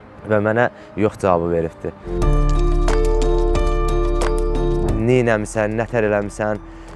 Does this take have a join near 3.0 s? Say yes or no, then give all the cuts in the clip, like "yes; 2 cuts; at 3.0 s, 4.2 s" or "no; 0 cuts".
no; 1 cut; at 4.9 s